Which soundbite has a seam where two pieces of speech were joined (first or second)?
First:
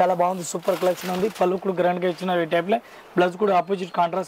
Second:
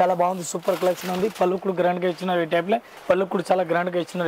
second